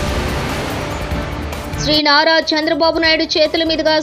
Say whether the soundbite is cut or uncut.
uncut